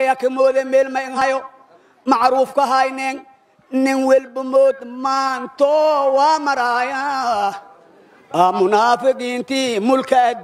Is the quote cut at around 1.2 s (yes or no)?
yes